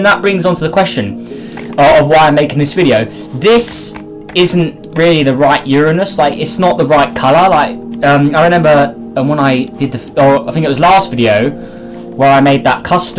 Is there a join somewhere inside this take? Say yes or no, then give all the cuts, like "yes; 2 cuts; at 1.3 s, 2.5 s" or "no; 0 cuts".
yes; 1 cut; at 4.7 s